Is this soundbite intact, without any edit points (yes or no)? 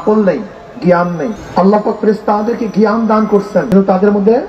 no